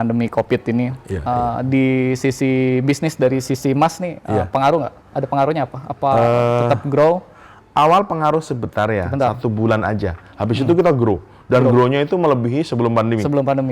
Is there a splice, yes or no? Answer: no